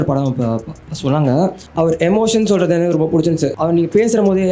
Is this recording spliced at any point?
yes; 2 cuts; at 1.6 s, 3.5 s

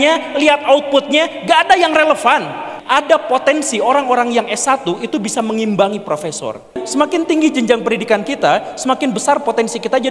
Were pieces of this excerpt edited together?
yes; 2 cuts; at 2.7 s, 6.8 s

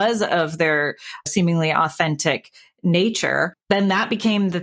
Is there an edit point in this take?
no; 0 cuts

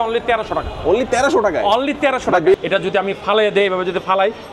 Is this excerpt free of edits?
no; 1 cut; at 2.5 s

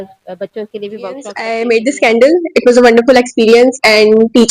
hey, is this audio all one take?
no; 1 cut; at 1.4 s

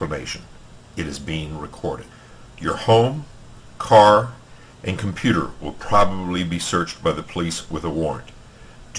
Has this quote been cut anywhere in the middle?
yes; 1 cut; at 7.5 s

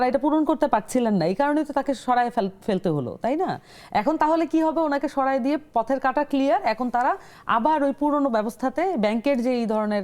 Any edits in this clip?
no; 0 cuts

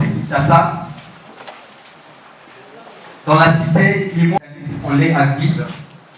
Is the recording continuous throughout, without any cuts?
no; 1 cut; at 4.5 s

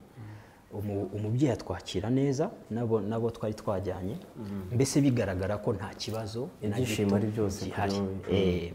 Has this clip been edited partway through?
no; 0 cuts

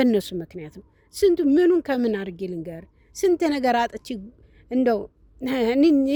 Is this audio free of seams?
yes; 0 cuts

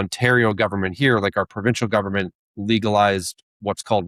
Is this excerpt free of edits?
yes; 0 cuts

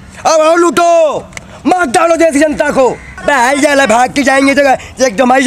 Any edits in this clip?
yes; 1 cut; at 3.1 s

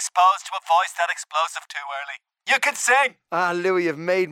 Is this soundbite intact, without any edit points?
no; 1 cut; at 2.4 s

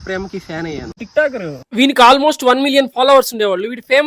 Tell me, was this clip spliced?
yes; 1 cut; at 1.0 s

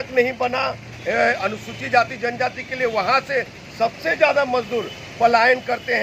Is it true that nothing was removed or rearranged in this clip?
yes; 0 cuts

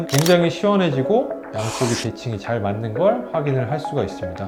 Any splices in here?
no; 0 cuts

